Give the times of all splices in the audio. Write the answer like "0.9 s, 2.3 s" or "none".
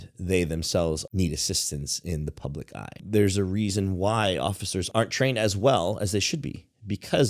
1.0 s, 3.0 s, 4.9 s